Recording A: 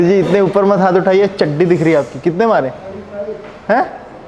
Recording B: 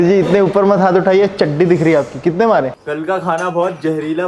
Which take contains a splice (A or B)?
B